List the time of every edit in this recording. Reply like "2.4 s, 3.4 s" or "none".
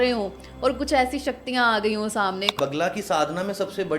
2.6 s